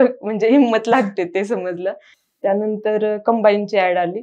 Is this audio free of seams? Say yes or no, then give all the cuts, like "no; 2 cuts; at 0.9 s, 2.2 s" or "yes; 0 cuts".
yes; 0 cuts